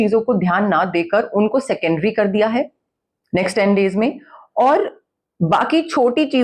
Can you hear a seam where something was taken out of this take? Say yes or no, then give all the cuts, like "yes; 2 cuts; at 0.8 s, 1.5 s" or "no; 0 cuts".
no; 0 cuts